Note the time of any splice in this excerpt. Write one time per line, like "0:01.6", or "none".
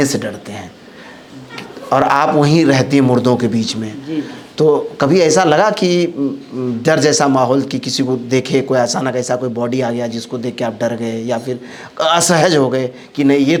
none